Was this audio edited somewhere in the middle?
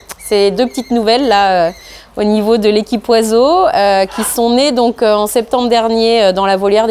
no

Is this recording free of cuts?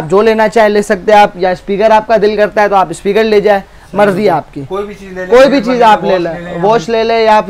yes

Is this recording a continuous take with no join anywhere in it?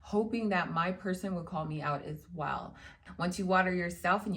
no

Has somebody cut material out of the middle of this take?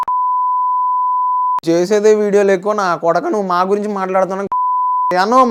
no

